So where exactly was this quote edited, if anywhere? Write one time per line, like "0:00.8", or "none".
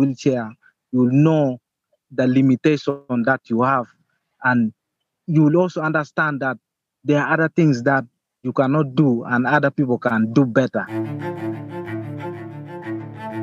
0:10.9

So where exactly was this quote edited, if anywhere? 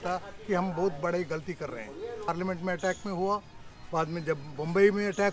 0:02.3

